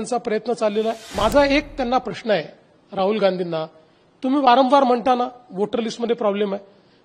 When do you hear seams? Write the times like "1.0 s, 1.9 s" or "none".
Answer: 1.1 s